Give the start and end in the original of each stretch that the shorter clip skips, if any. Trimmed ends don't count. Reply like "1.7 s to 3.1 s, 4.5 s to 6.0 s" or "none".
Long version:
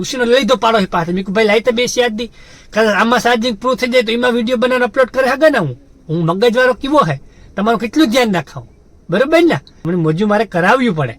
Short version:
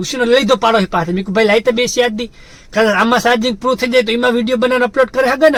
none